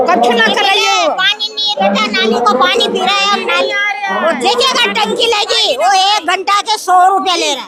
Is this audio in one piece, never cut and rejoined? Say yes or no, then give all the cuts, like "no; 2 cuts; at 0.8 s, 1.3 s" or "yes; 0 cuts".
yes; 0 cuts